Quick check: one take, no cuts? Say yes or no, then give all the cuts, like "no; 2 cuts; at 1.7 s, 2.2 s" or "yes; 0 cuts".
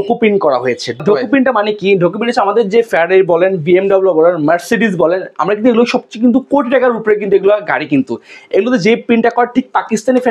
no; 1 cut; at 1.0 s